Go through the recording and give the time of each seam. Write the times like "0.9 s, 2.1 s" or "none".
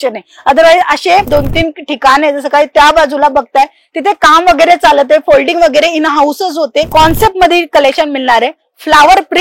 6.9 s